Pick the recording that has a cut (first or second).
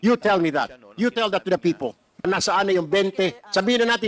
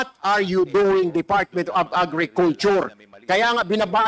first